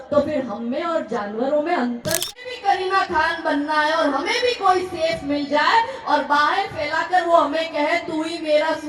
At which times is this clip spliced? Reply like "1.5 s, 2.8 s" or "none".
2.3 s

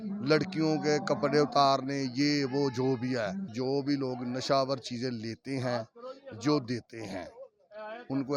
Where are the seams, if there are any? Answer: 3.4 s

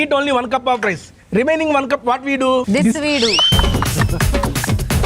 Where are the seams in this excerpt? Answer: 2.7 s

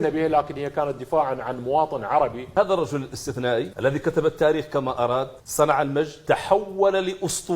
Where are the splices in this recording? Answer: 2.4 s

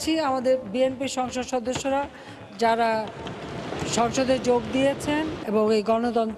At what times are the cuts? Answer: 5.4 s

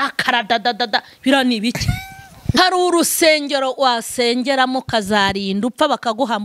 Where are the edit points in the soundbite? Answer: 2.6 s

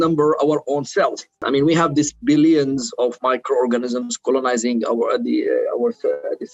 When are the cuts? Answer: 1.4 s

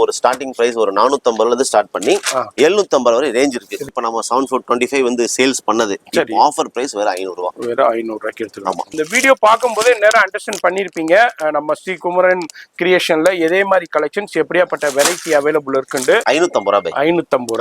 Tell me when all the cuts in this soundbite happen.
3.9 s, 8.9 s, 16.2 s

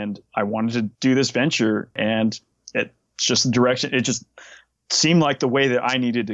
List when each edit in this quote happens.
0.9 s, 2.0 s

